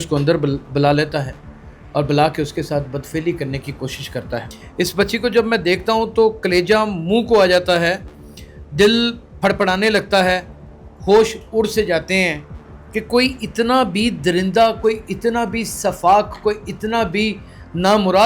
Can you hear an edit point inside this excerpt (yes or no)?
yes